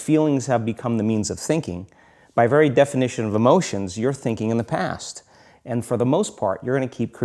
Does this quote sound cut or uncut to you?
uncut